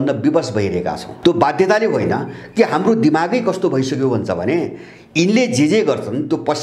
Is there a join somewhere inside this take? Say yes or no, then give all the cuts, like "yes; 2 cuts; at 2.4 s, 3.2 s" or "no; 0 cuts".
yes; 1 cut; at 1.1 s